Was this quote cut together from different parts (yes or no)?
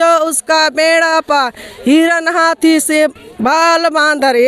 no